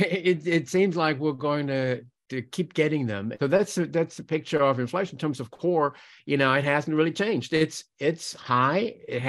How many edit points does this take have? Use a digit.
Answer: 1